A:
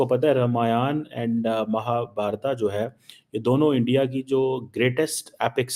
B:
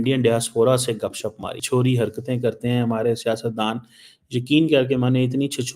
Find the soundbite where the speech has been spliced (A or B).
B